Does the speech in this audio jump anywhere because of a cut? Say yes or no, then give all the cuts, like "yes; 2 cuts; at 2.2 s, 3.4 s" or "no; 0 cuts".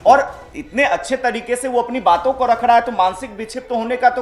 no; 0 cuts